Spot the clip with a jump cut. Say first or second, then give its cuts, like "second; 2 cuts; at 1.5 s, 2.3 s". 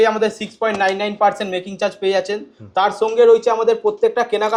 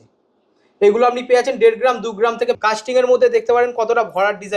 second; 1 cut; at 2.6 s